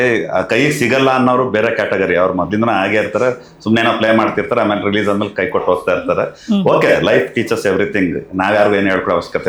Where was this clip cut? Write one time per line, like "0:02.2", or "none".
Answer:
none